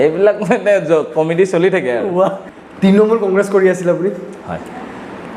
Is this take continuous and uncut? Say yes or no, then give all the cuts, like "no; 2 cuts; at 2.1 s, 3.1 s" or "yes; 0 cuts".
no; 1 cut; at 2.4 s